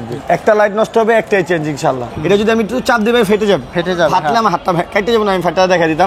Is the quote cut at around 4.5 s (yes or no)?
no